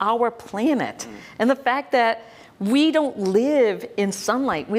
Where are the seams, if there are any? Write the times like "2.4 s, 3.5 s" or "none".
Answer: none